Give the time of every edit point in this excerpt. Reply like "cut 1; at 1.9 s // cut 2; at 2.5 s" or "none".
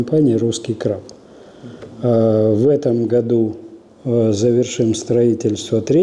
none